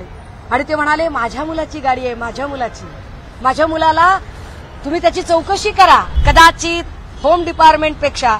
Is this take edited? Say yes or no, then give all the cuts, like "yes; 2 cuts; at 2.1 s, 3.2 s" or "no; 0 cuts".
yes; 1 cut; at 6.2 s